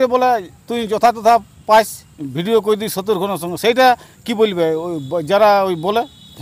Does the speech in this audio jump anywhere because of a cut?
no; 0 cuts

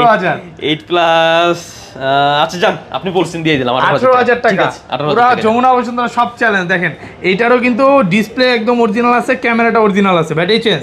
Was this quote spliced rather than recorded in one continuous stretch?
no; 0 cuts

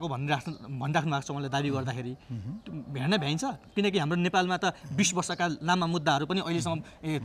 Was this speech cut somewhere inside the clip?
no; 0 cuts

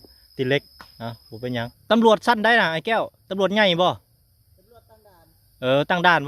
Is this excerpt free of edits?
no; 1 cut; at 1.8 s

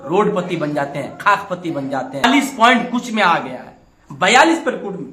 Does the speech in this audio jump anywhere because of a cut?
yes; 1 cut; at 2.2 s

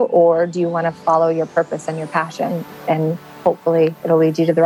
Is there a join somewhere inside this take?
yes; 1 cut; at 3.3 s

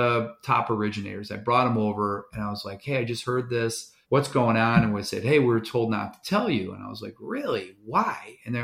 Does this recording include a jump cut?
yes; 1 cut; at 3.9 s

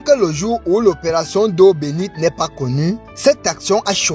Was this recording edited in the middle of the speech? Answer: no; 0 cuts

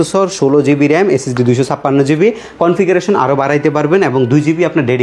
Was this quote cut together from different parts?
no; 0 cuts

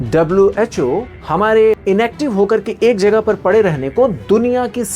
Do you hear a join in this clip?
yes; 2 cuts; at 1.2 s, 1.8 s

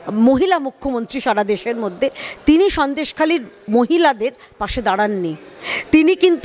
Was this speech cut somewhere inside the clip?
no; 0 cuts

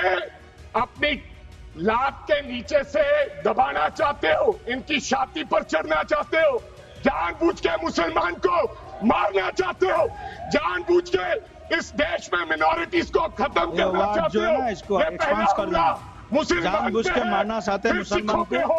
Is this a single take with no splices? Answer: yes; 0 cuts

